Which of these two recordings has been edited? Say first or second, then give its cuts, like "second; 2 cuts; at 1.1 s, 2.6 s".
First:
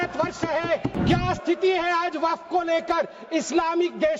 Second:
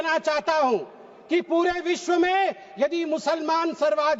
first; 1 cut; at 0.9 s